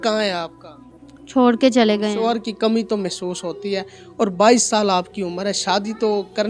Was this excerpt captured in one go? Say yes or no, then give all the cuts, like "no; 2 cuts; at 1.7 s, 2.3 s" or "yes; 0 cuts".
no; 1 cut; at 2.2 s